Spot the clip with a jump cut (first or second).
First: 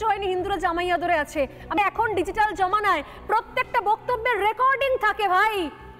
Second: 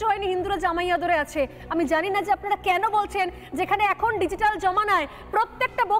first